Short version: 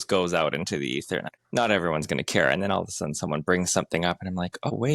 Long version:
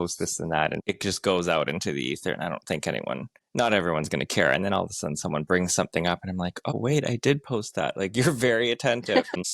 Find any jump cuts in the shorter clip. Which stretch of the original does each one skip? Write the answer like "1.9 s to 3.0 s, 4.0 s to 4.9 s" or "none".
2.4 s to 3.3 s